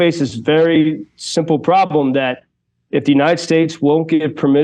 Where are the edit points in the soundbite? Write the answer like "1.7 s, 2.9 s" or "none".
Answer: 2.8 s